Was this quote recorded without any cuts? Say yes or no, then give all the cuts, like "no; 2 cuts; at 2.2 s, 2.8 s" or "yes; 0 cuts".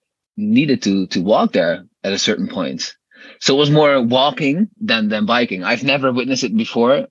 yes; 0 cuts